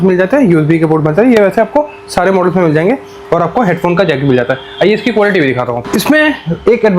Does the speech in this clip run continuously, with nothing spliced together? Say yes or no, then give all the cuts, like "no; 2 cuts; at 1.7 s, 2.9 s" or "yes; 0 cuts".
yes; 0 cuts